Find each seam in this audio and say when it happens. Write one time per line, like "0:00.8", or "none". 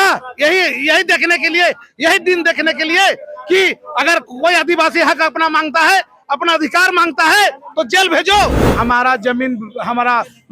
0:08.7